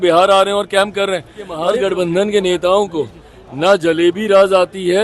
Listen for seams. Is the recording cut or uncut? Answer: cut